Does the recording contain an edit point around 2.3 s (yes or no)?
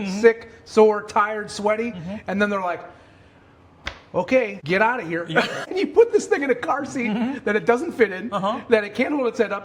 no